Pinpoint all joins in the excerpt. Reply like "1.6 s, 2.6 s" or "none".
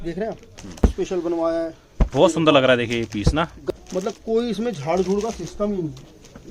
0.8 s, 3.6 s